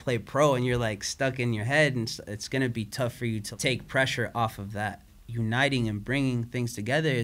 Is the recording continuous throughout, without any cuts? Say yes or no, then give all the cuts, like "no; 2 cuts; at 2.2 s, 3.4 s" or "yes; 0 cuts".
no; 2 cuts; at 3.5 s, 5.1 s